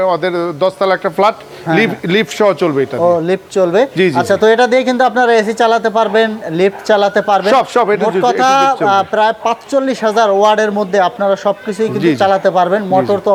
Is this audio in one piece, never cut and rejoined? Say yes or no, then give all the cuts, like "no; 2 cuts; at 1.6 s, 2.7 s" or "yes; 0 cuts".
yes; 0 cuts